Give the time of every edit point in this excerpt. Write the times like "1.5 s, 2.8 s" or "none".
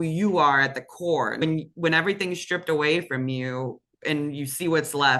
1.4 s